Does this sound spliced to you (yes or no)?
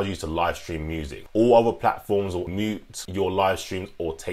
yes